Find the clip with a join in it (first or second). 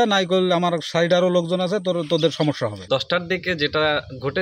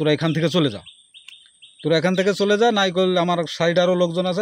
first